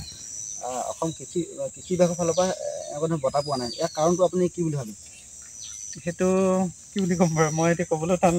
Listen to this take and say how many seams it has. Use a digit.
0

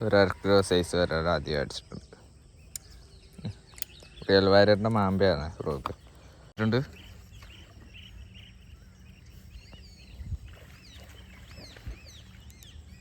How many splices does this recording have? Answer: 1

